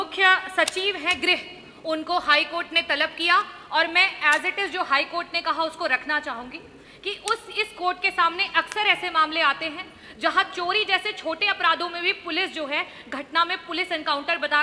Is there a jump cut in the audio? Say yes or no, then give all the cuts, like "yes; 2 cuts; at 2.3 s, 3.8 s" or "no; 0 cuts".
no; 0 cuts